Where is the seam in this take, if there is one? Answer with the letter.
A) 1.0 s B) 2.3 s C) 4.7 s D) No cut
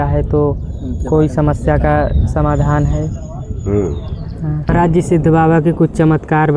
C